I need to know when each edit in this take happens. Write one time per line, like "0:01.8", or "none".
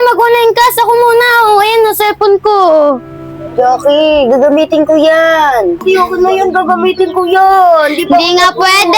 0:05.8

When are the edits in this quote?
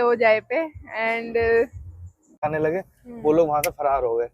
0:02.4

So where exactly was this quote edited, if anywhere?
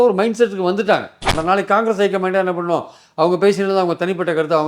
0:01.3

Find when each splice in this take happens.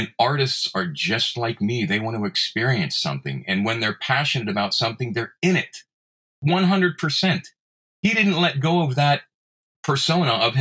none

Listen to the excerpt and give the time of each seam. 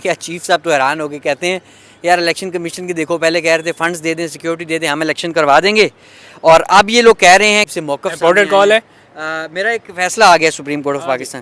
0:07.7

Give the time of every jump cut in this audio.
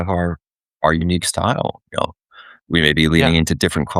none

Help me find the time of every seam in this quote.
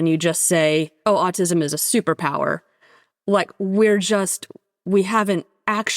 0:00.9

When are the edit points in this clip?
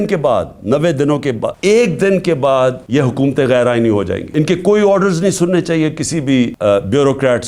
0:01.5
0:02.8
0:04.2
0:06.5

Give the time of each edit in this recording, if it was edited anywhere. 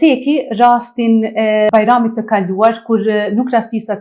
0:01.7

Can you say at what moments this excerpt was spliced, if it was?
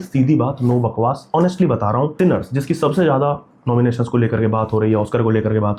none

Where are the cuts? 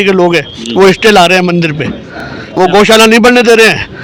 none

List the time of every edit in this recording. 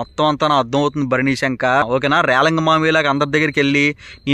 0:01.8

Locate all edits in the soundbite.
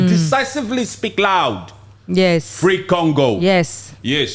none

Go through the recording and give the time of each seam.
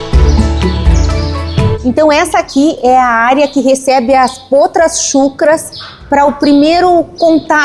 0:01.8

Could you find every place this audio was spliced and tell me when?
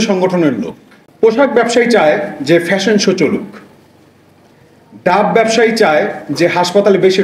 0:01.1

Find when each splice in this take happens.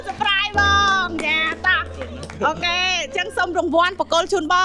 none

